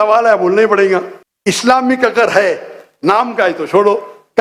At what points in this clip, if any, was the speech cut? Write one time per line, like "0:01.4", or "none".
none